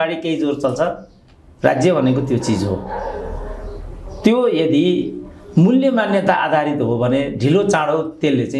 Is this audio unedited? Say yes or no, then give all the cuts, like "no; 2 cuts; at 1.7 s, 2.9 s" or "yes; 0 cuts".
yes; 0 cuts